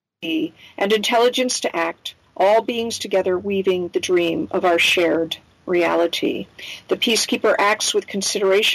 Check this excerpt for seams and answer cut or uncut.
uncut